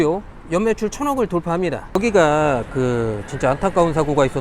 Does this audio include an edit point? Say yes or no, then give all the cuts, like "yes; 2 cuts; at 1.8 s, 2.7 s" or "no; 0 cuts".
no; 0 cuts